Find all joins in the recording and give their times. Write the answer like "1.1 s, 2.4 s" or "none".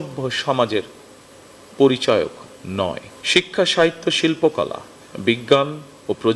none

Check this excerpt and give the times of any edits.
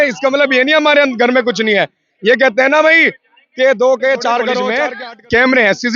4.7 s

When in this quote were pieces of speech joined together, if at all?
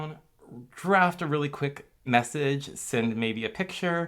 1.9 s

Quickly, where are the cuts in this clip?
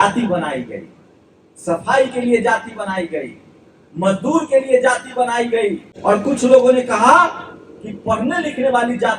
5.9 s

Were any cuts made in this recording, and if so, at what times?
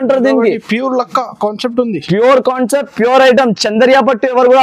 none

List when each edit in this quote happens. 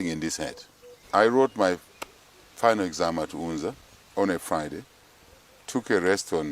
1.0 s

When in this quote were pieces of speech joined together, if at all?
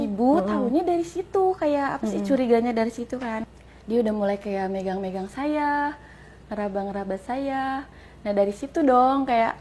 3.4 s

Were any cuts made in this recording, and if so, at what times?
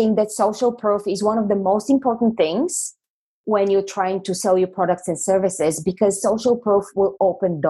none

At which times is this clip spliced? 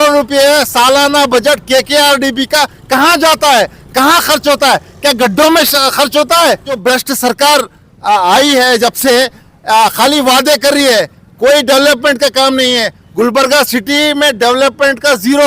6.7 s

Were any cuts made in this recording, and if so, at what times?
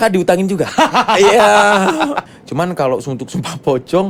2.3 s

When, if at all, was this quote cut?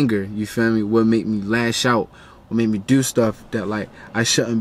none

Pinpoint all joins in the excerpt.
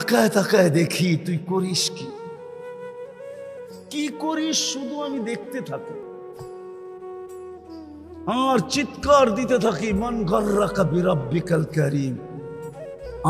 1.8 s, 3.4 s

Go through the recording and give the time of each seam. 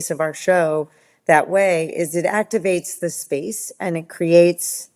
none

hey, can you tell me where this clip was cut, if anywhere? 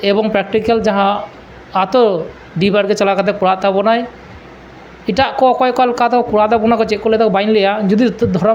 none

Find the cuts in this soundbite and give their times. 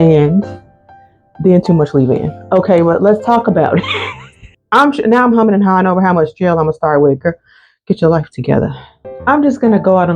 4.5 s, 9.1 s

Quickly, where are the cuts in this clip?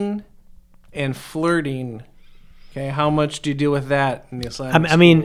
none

